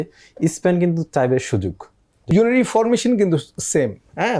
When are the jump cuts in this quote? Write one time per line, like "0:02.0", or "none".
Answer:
0:02.3